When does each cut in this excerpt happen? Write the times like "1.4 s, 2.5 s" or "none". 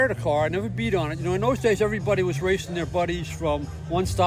none